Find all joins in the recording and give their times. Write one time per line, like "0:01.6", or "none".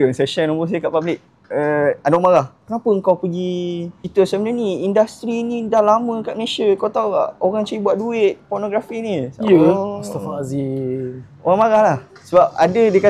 0:03.9